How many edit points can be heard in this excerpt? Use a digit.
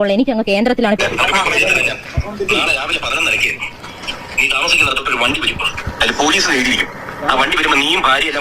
1